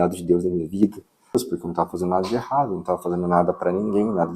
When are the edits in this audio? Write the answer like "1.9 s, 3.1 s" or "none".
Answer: 1.3 s